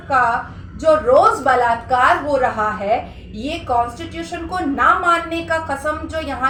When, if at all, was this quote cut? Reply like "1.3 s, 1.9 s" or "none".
none